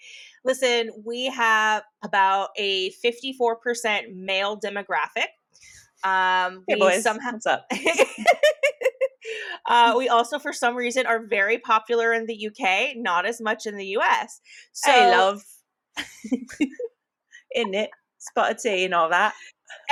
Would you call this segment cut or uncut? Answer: uncut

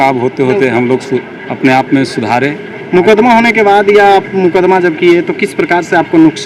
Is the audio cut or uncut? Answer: uncut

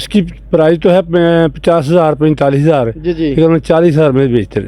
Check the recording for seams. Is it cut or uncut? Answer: uncut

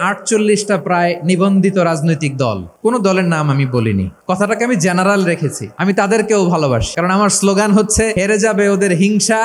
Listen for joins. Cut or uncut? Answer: cut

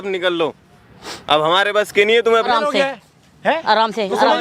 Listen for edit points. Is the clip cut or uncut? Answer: cut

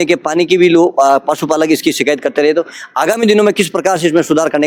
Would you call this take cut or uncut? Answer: uncut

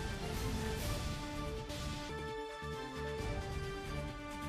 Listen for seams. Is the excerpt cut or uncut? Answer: uncut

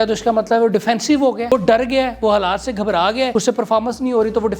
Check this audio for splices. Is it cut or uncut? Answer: cut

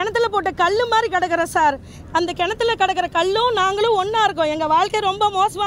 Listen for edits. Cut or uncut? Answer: uncut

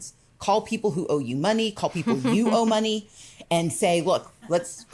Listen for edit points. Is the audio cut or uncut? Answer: uncut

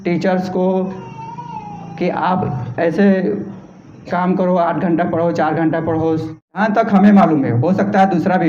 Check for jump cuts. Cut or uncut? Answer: cut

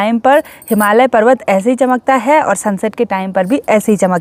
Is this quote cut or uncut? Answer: uncut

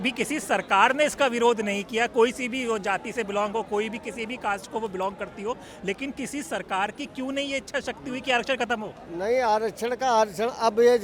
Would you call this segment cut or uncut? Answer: uncut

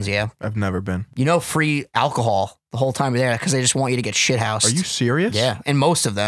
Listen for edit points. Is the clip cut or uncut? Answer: cut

